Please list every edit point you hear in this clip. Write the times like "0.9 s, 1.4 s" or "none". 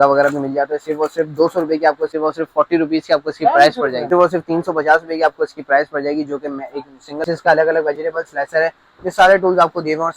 2.1 s, 4.0 s, 7.2 s